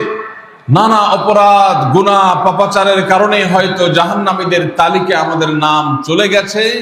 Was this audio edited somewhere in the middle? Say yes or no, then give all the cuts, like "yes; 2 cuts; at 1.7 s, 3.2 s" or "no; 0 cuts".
no; 0 cuts